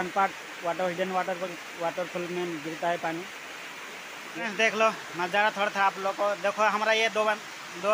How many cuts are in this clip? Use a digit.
1